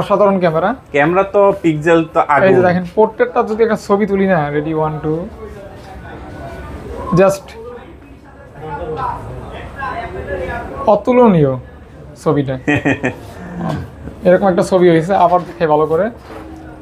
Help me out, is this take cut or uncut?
uncut